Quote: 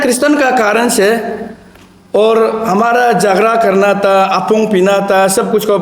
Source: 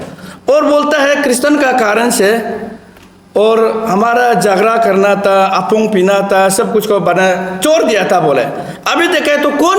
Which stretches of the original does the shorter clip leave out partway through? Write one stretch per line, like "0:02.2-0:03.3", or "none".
none